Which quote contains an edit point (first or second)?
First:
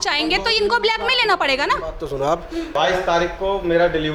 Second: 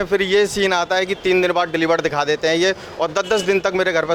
first